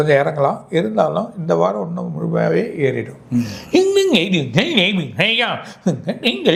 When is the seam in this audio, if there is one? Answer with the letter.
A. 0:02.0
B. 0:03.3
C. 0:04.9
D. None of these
D